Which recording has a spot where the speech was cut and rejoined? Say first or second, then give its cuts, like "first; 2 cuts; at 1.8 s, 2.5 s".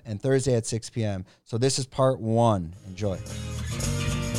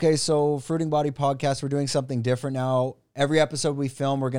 first; 1 cut; at 2.9 s